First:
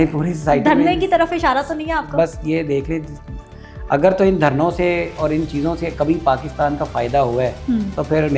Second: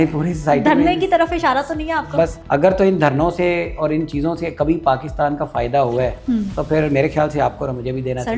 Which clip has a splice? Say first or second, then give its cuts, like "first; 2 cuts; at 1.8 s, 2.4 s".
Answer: second; 1 cut; at 2.4 s